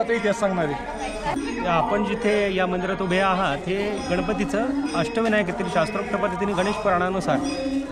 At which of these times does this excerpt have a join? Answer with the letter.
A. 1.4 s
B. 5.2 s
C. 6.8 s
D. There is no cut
A